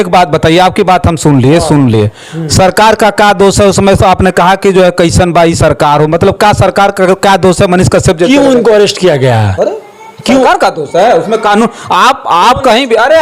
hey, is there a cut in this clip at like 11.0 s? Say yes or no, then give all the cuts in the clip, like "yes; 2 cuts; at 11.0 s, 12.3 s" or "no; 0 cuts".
no; 0 cuts